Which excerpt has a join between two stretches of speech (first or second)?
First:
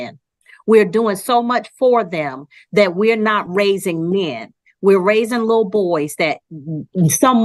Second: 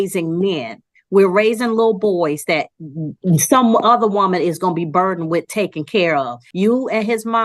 second